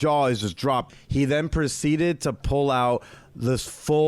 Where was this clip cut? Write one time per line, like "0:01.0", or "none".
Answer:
0:00.9